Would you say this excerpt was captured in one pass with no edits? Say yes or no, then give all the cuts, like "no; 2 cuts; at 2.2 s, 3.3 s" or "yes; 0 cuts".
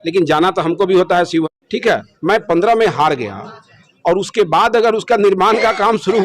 no; 1 cut; at 1.6 s